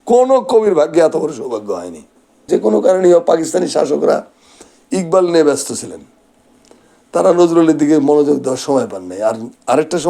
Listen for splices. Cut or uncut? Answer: cut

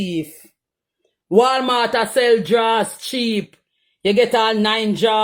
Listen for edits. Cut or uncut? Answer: uncut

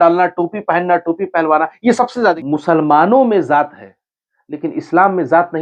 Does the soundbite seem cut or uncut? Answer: cut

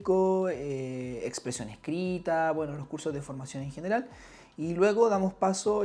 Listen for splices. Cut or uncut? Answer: uncut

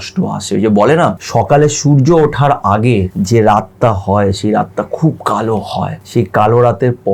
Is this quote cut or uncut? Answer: cut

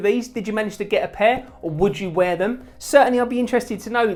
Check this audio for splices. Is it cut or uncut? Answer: uncut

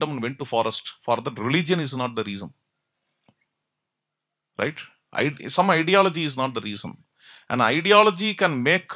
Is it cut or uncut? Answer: uncut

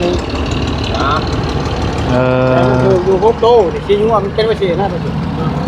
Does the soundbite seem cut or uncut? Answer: uncut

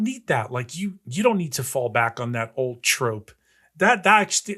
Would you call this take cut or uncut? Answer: cut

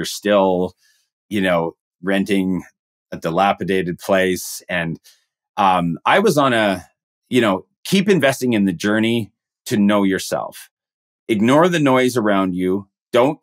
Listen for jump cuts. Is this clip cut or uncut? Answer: uncut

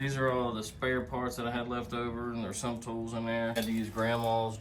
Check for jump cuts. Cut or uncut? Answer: cut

